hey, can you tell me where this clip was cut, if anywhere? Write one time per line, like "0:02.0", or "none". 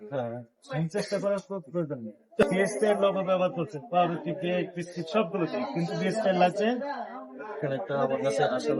0:02.4